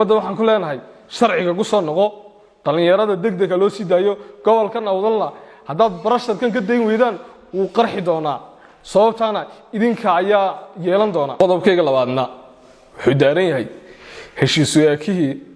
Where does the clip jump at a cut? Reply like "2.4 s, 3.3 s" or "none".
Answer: none